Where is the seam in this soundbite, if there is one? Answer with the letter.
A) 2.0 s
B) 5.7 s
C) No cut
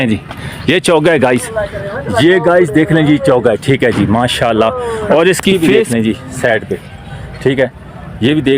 B